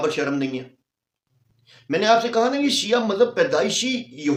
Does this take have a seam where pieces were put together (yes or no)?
no